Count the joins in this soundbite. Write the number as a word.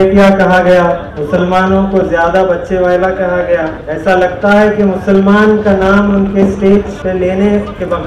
three